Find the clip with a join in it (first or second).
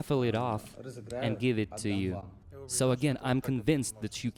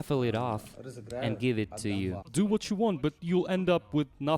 second